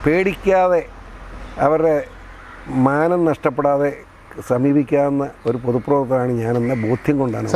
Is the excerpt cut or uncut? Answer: uncut